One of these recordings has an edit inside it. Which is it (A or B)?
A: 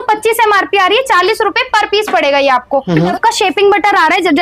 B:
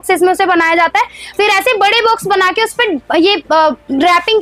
A